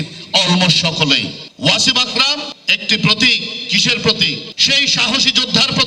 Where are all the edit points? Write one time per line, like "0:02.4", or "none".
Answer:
0:01.4